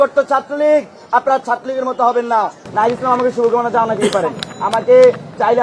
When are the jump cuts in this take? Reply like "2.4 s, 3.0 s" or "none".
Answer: 2.6 s

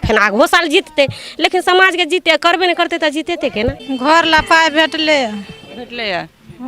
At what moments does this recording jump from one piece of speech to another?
3.8 s

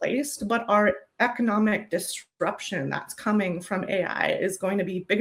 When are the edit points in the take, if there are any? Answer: none

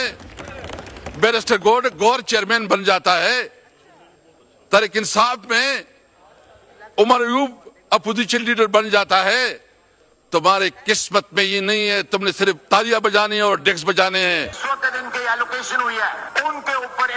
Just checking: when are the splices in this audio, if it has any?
14.5 s

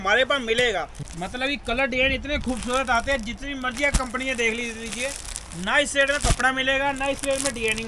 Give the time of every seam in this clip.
1.0 s

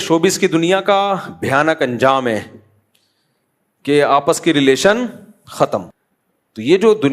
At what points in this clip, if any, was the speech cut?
5.9 s

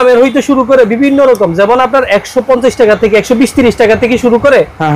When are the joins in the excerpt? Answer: none

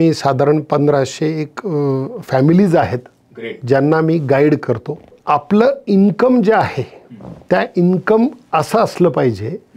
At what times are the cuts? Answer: 5.2 s

